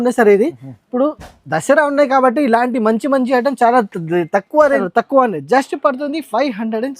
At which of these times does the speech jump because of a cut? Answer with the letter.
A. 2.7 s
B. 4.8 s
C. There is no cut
B